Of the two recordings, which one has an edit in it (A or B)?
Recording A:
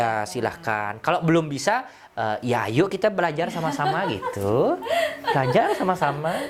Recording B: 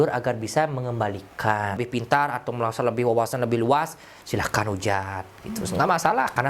B